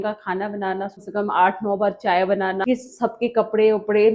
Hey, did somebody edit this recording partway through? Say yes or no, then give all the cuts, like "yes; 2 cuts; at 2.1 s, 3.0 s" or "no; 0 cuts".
yes; 2 cuts; at 1.0 s, 2.6 s